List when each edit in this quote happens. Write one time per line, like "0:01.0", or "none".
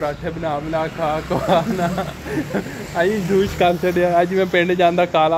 none